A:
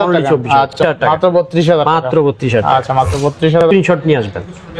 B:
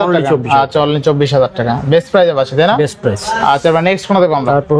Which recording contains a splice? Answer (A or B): A